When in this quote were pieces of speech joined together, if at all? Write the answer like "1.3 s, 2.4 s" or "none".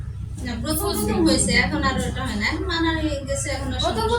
none